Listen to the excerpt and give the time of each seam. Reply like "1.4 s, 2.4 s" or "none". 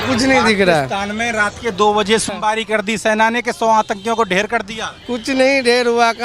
2.3 s

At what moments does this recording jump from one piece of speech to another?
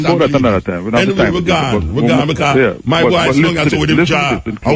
none

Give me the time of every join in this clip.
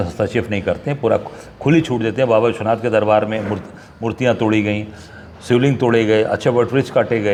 none

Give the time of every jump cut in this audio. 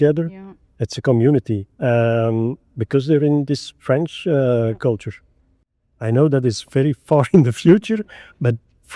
5.6 s

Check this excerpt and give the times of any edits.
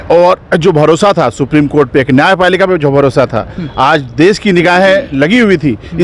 none

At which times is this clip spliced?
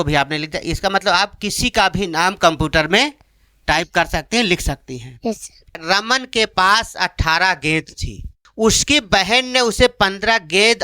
5.8 s, 8.4 s

